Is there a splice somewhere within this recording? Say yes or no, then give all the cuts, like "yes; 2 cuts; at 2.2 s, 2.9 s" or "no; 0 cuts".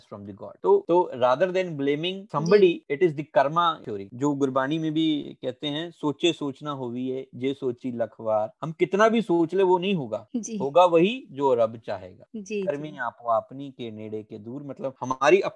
no; 0 cuts